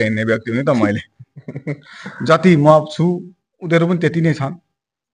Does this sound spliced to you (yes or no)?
no